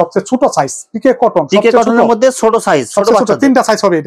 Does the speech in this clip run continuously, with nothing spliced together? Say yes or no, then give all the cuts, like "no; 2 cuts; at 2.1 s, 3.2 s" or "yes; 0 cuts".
yes; 0 cuts